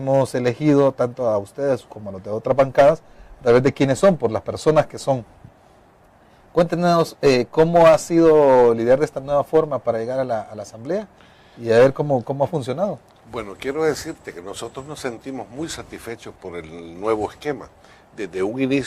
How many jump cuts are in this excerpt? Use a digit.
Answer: 1